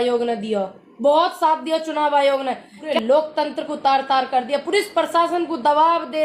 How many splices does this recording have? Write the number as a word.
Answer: one